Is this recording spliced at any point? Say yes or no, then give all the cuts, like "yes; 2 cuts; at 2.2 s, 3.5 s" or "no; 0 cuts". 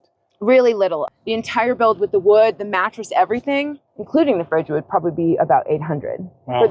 yes; 2 cuts; at 1.0 s, 3.8 s